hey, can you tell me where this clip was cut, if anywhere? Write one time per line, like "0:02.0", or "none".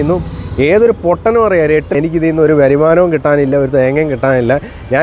0:01.9